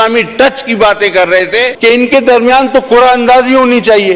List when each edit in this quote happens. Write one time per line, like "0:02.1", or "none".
0:01.7